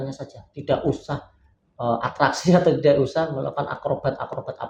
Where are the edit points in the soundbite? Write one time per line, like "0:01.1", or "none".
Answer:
none